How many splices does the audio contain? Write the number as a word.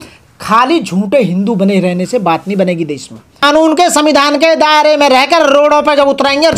one